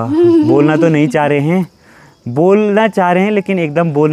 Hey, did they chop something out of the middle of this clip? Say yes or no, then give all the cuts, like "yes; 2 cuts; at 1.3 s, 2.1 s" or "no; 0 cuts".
no; 0 cuts